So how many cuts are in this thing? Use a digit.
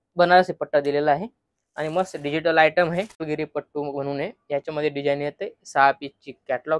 1